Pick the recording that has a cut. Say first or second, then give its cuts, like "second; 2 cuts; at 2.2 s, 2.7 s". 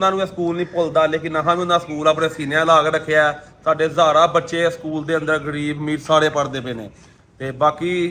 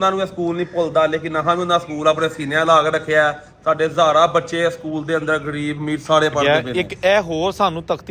second; 1 cut; at 6.4 s